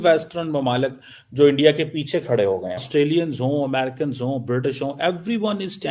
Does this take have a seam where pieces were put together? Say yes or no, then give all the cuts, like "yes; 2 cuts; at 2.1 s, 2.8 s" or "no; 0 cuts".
yes; 1 cut; at 2.8 s